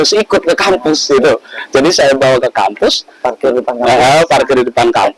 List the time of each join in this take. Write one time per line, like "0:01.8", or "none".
none